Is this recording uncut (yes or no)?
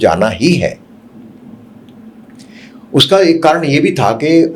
yes